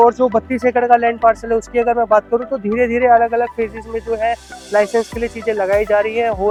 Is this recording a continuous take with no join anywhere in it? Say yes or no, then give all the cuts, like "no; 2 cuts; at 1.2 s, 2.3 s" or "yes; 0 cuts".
yes; 0 cuts